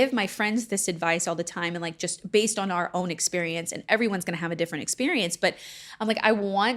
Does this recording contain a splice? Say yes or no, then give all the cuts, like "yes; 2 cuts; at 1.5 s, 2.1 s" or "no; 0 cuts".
no; 0 cuts